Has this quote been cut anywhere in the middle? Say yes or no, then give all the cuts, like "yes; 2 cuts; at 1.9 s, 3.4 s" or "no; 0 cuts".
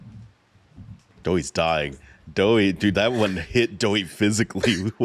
yes; 1 cut; at 1.1 s